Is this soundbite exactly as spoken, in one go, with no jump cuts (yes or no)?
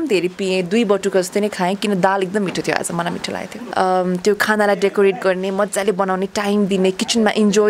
no